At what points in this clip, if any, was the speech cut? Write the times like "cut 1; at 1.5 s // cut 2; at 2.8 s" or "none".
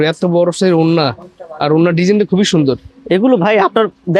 none